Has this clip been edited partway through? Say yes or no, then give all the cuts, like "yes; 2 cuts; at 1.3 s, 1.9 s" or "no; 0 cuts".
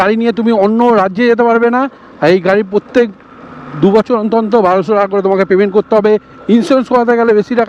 no; 0 cuts